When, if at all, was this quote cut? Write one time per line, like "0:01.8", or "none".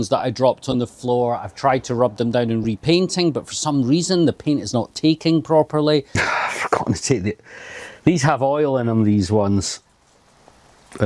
0:06.2

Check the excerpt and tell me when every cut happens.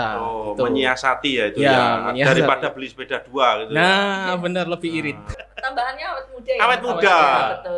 0:05.3

